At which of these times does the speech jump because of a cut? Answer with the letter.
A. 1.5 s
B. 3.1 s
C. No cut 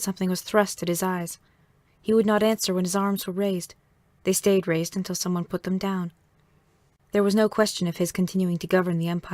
B